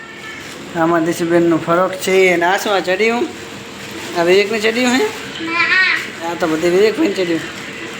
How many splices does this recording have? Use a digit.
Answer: 0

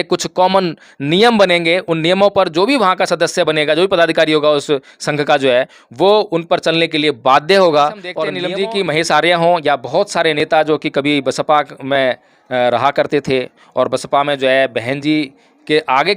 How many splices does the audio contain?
1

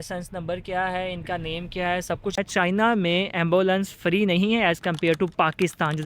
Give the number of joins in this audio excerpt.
1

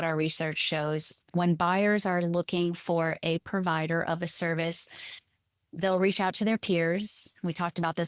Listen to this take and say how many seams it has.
0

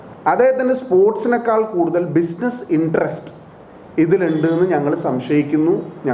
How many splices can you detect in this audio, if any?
0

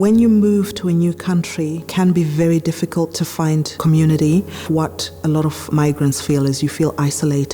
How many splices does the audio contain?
2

